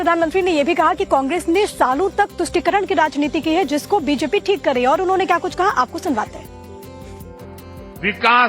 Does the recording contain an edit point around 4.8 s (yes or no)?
yes